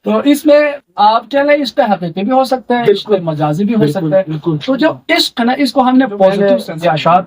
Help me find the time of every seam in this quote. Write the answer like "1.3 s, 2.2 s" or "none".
6.4 s